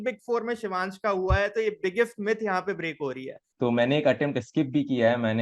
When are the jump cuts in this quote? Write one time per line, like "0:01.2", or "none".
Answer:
0:03.4